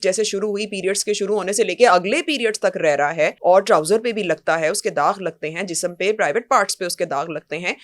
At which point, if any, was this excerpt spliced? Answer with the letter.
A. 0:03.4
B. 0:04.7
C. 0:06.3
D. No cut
A